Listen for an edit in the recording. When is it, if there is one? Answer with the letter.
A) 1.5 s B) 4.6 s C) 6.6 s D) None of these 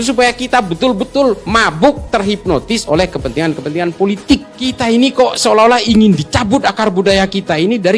B